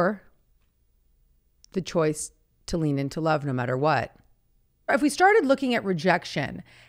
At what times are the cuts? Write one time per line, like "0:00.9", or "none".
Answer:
0:04.9